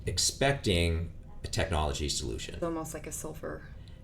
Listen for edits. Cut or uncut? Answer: cut